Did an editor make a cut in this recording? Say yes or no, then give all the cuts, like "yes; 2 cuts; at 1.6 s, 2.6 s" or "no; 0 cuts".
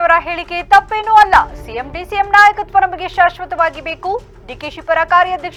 no; 0 cuts